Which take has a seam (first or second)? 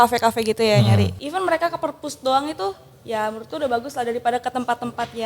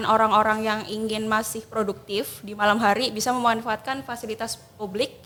first